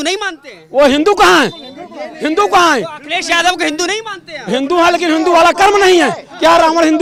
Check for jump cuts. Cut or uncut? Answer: uncut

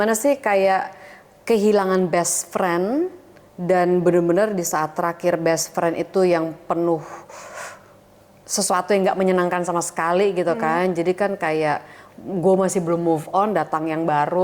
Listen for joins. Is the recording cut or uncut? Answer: uncut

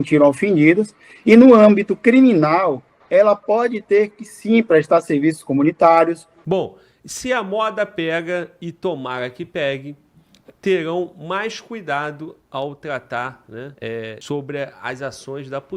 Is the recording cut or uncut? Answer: cut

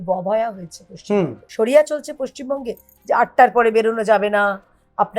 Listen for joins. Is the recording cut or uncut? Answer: cut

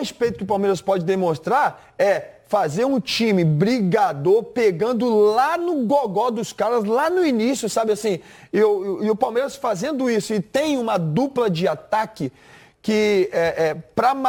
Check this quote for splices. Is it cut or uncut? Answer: uncut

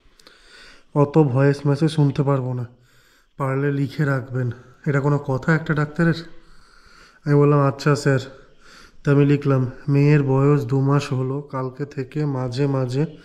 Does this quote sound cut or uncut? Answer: uncut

